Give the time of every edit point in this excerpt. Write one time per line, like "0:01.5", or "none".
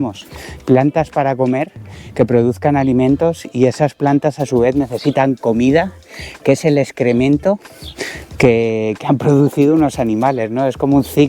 none